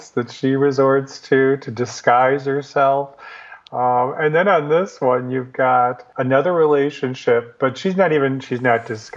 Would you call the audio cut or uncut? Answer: uncut